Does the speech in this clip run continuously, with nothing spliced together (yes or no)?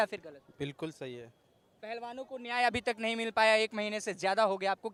yes